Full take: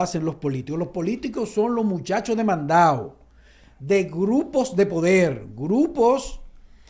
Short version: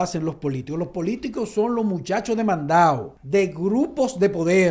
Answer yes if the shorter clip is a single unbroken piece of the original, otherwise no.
no